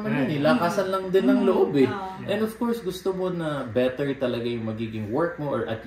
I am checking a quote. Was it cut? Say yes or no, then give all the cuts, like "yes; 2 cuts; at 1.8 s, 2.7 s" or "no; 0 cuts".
no; 0 cuts